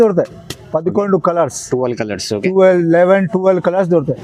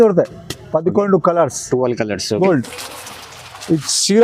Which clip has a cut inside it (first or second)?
second